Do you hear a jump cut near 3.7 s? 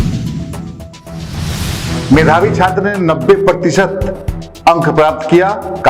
no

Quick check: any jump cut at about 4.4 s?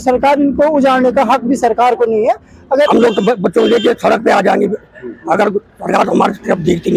no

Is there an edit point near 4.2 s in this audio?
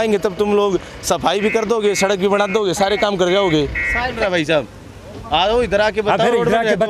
yes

